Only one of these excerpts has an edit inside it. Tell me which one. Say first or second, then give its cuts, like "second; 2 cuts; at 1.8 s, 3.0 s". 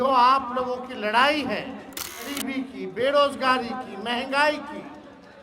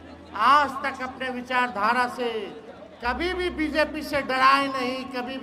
first; 1 cut; at 2.3 s